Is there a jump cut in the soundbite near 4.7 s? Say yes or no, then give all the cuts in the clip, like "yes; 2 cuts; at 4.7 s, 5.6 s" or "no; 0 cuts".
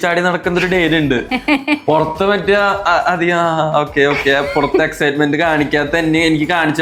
no; 0 cuts